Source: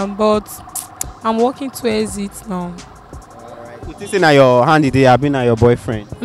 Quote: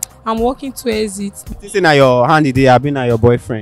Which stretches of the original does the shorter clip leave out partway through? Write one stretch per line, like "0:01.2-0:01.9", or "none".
0:02.4-0:03.8